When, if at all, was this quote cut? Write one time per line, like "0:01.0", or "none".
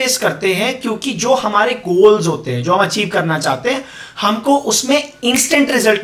none